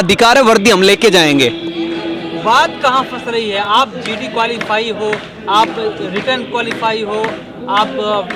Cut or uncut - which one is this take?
uncut